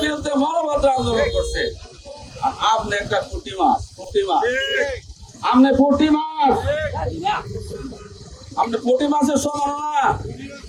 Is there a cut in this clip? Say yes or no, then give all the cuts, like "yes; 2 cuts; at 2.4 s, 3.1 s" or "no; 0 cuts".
no; 0 cuts